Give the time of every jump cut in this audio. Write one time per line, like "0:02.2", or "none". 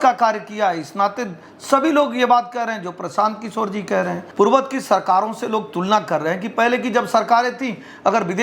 0:04.2